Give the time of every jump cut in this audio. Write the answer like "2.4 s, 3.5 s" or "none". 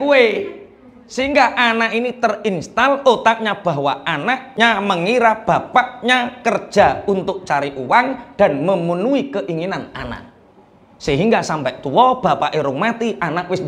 4.5 s